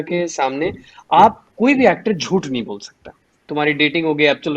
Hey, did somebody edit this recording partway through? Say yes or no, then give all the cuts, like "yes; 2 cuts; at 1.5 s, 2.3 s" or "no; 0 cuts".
yes; 1 cut; at 3.5 s